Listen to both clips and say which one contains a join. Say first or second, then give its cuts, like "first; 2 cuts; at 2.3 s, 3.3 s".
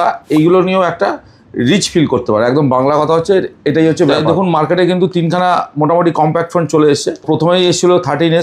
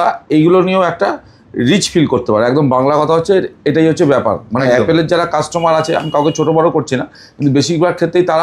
first; 2 cuts; at 4.2 s, 7.2 s